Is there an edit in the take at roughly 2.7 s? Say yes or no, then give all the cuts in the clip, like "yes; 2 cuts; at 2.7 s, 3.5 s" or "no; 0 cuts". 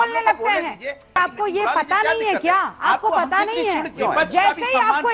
no; 2 cuts; at 1.2 s, 4.1 s